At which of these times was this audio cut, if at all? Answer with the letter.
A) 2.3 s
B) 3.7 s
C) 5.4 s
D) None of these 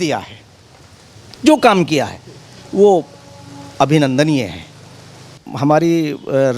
C